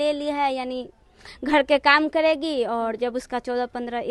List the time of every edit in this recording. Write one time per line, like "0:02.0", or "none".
none